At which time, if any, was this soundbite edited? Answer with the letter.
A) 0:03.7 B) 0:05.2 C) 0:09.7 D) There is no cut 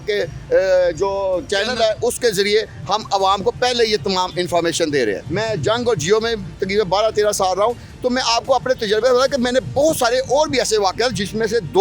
B